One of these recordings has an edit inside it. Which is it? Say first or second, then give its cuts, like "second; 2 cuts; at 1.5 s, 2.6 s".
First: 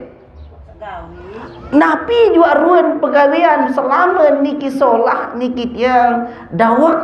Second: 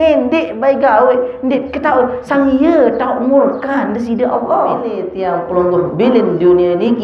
second; 1 cut; at 5.1 s